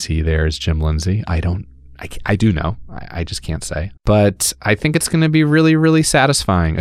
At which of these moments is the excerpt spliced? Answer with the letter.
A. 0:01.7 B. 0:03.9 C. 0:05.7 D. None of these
B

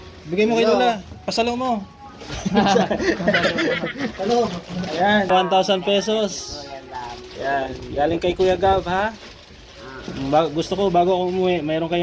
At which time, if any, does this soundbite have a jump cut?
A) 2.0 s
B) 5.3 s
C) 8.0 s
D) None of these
B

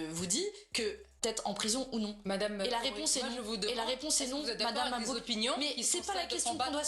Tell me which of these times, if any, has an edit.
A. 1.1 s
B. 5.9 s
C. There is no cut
A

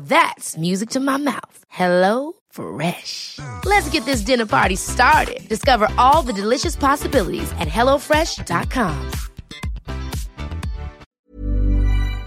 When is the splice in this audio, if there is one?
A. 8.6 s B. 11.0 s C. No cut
B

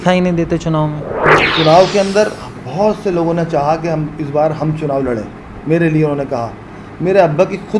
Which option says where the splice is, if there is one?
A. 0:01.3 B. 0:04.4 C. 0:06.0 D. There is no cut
A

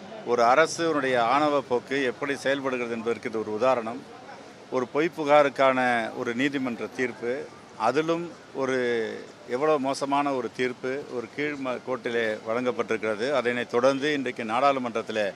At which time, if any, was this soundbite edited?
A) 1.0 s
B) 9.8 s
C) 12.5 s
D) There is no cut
A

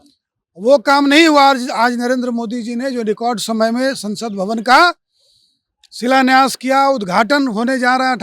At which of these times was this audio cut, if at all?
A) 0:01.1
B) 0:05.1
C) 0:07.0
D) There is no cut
D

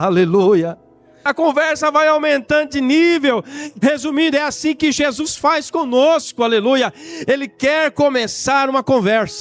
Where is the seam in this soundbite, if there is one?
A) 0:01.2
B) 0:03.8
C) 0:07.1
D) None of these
A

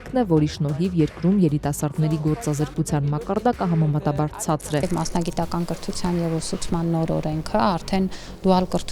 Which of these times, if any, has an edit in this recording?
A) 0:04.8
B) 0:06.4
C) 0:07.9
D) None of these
A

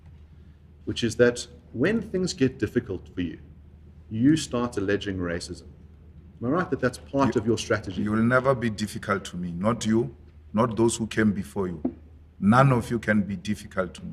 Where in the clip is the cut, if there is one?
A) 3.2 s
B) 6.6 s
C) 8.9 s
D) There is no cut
D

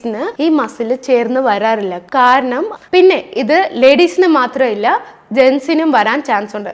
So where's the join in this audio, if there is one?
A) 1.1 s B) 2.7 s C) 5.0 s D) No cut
B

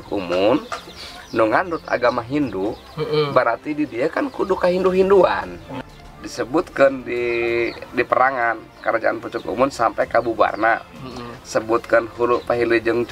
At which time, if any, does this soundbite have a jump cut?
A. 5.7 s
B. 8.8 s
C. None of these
A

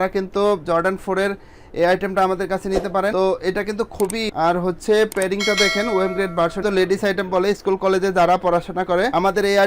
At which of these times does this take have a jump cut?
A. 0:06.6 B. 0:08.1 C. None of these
A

